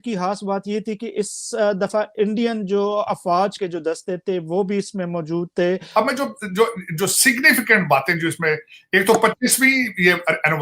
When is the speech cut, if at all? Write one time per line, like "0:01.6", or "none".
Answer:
0:03.6
0:05.8